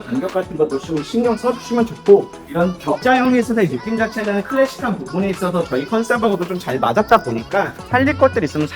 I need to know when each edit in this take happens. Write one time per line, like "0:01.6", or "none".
0:02.4
0:07.8